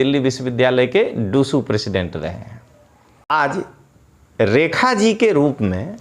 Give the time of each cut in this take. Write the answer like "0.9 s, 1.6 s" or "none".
3.3 s